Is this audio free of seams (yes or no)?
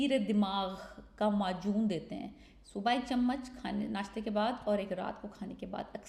yes